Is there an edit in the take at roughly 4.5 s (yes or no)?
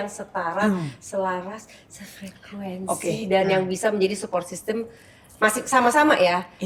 no